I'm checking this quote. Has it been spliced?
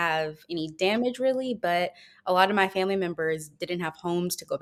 no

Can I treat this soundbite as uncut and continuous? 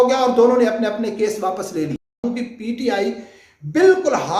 no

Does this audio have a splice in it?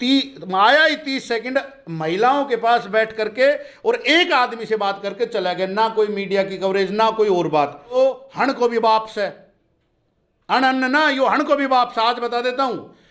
yes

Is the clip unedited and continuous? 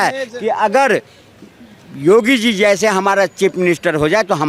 yes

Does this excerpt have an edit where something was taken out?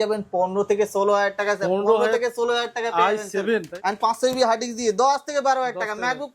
yes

